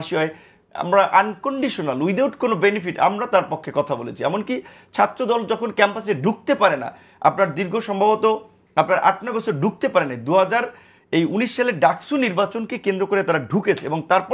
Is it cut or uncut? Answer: uncut